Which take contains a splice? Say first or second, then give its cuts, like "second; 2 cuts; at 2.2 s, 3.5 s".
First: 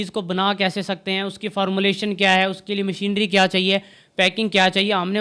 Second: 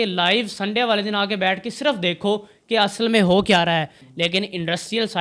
second; 1 cut; at 4.0 s